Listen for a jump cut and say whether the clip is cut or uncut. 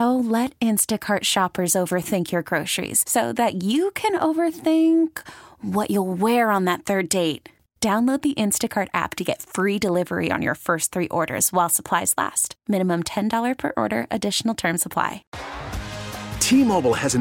cut